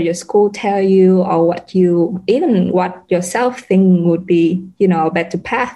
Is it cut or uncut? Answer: uncut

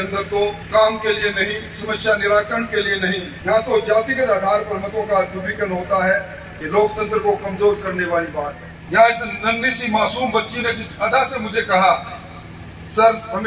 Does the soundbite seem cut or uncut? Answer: cut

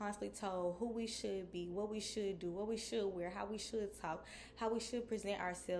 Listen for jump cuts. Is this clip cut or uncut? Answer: uncut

